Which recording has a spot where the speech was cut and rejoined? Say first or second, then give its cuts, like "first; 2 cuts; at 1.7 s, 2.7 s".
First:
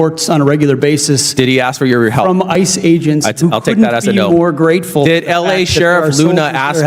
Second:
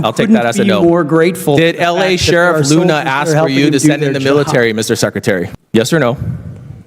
second; 1 cut; at 5.6 s